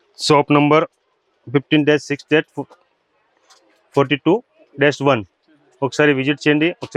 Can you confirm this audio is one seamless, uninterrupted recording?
yes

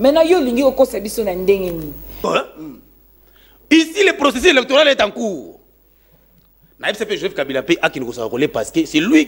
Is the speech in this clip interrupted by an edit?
yes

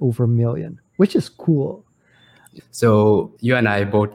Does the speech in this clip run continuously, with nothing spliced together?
no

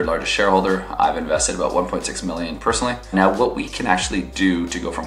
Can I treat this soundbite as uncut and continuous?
no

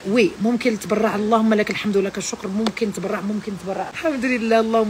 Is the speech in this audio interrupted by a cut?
no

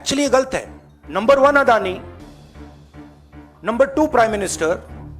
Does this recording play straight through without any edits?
no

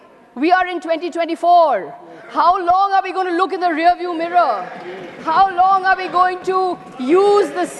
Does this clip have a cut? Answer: no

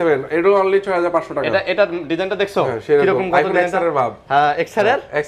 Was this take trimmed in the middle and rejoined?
no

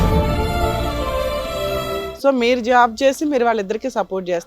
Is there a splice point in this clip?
yes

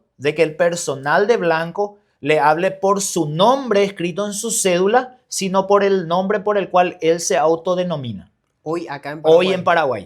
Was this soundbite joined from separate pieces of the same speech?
no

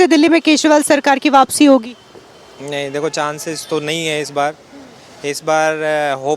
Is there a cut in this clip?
no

